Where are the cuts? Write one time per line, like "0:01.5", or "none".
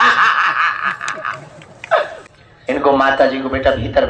0:02.2